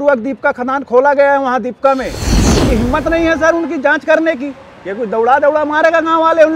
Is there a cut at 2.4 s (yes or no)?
yes